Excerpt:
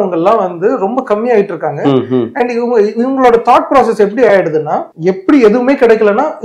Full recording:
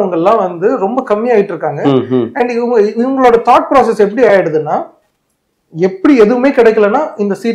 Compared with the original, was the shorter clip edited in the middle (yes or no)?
yes